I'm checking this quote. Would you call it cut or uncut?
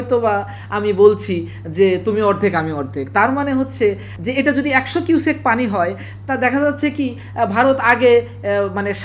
cut